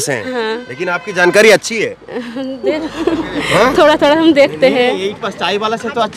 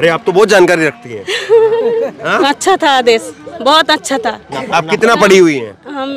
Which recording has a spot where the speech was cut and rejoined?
second; 1 cut; at 2.5 s

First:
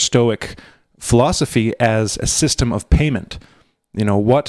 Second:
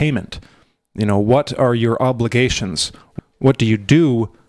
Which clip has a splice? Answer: second; 1 cut; at 3.1 s

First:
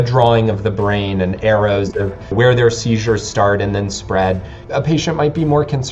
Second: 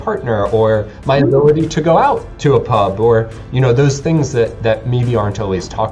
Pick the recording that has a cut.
first; 2 cuts; at 2.3 s, 4.5 s

